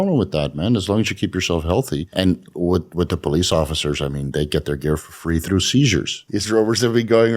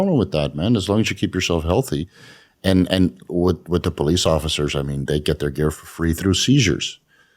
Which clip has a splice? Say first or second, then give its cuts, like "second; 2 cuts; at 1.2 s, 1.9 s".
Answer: first; 2 cuts; at 2.1 s, 6.2 s